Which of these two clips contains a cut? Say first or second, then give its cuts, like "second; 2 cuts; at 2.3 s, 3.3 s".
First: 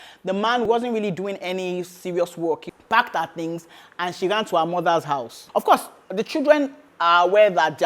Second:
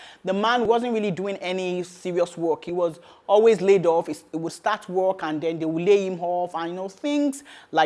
first; 2 cuts; at 2.7 s, 5.3 s